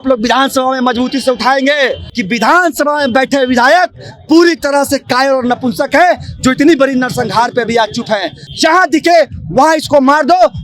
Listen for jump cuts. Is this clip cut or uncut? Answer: cut